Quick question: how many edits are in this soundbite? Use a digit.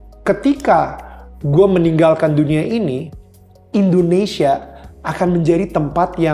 0